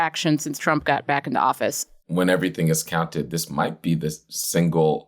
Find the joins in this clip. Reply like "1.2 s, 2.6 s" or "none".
1.9 s